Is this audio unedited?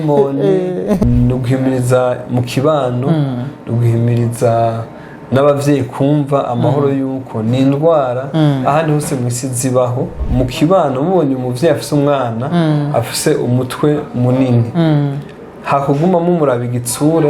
no; 2 cuts; at 1.0 s, 10.1 s

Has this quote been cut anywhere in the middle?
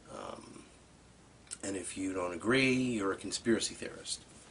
yes; 1 cut; at 1.9 s

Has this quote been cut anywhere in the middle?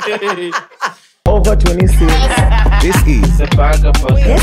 yes; 1 cut; at 1.1 s

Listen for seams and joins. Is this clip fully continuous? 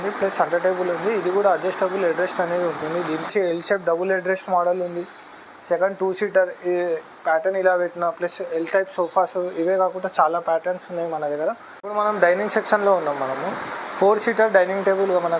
no; 2 cuts; at 3.3 s, 12.1 s

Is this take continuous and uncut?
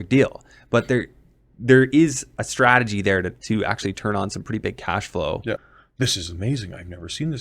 no; 1 cut; at 5.8 s

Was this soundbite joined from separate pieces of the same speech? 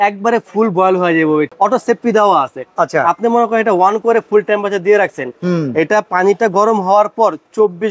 yes; 1 cut; at 1.5 s

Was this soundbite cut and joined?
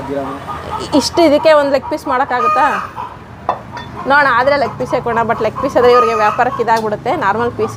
no; 0 cuts

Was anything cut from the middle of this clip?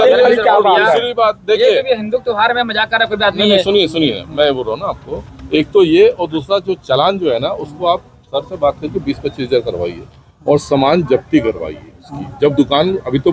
no; 0 cuts

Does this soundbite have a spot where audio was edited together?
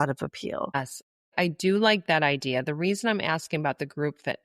yes; 1 cut; at 1.2 s

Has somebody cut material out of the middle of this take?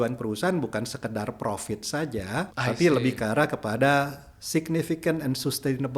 yes; 1 cut; at 2.5 s

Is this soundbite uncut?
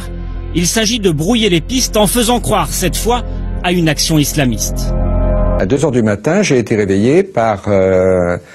no; 1 cut; at 5.6 s

